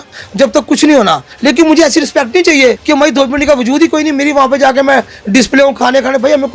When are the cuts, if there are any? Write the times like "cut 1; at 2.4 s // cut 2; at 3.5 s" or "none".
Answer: cut 1; at 1.3 s // cut 2; at 2.8 s